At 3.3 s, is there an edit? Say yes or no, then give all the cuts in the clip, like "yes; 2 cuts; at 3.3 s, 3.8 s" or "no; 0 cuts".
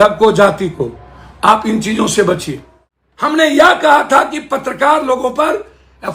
yes; 1 cut; at 3.3 s